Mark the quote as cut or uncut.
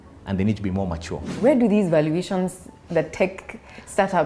cut